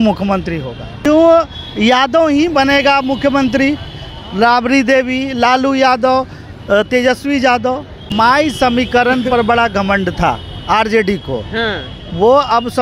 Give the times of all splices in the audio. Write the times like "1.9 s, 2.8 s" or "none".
1.0 s, 7.9 s